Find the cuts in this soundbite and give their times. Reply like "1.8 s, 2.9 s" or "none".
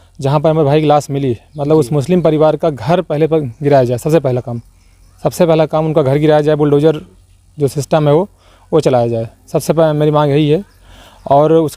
none